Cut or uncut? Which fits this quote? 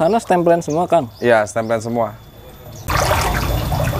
cut